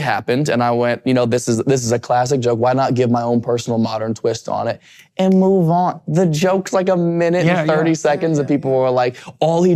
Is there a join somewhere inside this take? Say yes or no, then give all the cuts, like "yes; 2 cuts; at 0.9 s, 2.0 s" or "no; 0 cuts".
no; 0 cuts